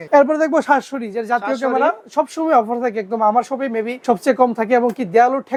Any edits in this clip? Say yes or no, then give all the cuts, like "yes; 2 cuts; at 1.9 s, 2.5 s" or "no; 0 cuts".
no; 0 cuts